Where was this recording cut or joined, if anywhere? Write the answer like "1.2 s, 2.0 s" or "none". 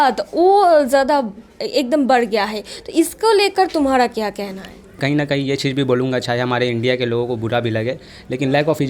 5.0 s